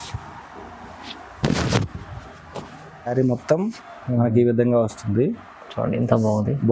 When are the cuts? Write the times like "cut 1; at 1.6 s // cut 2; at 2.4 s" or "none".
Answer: cut 1; at 3.1 s